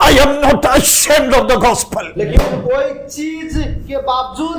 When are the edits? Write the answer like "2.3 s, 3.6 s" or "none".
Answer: none